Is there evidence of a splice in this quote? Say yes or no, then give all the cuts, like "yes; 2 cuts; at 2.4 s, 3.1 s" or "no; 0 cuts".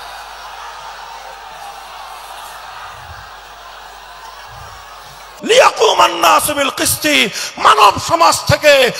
yes; 1 cut; at 5.2 s